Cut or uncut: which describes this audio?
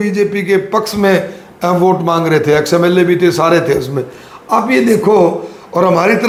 uncut